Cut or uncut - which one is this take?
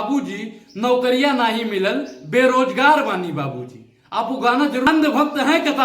cut